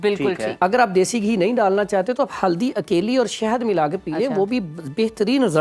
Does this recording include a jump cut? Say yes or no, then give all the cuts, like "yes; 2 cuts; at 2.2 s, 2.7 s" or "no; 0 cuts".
no; 0 cuts